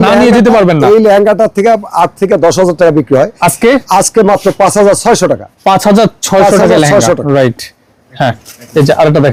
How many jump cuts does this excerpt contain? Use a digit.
0